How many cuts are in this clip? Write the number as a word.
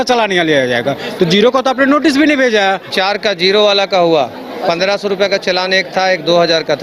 one